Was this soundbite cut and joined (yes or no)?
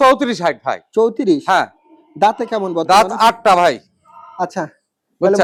no